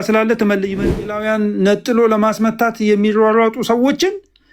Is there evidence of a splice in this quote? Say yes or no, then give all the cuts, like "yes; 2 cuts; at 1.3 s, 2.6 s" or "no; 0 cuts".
yes; 1 cut; at 1.0 s